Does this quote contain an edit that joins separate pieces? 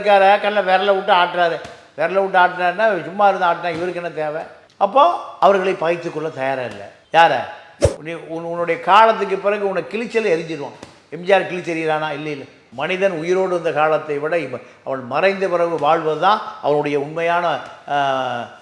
yes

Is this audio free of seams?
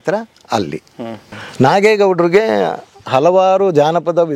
no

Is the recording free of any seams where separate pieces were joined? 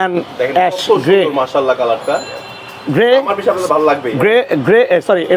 yes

